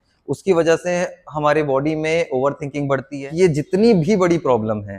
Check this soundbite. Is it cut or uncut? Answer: cut